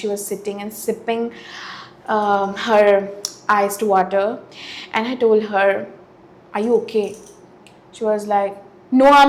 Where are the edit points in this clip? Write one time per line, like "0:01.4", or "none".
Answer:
none